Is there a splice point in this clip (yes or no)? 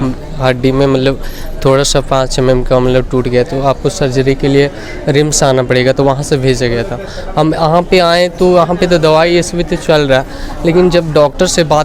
no